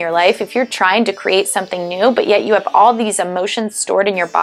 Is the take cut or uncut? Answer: uncut